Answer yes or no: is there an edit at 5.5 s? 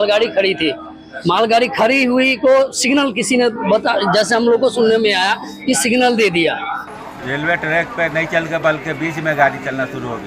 no